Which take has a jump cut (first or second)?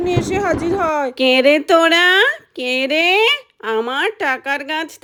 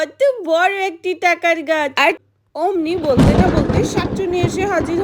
second